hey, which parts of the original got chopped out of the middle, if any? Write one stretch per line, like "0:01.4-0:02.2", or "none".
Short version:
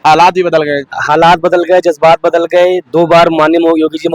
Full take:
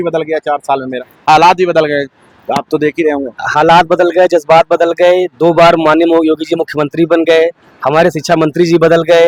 0:02.2-0:03.4